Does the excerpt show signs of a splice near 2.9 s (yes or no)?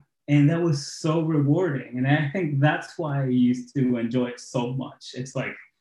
no